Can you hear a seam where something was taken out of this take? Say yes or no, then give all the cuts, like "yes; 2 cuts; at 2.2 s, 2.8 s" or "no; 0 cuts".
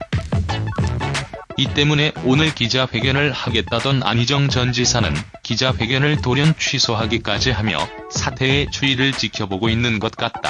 no; 0 cuts